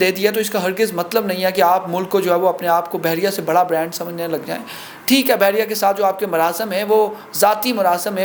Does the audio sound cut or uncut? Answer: uncut